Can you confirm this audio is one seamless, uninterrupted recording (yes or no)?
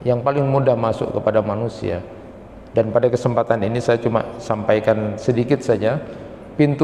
yes